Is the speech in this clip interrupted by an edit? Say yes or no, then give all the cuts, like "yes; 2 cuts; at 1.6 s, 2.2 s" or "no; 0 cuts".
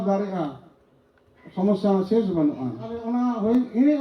yes; 1 cut; at 3.1 s